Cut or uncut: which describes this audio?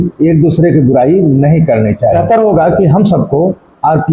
cut